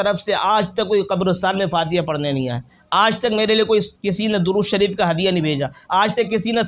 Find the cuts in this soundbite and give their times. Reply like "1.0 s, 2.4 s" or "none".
none